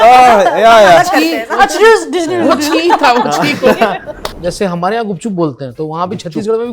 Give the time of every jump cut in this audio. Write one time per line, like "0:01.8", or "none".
0:04.4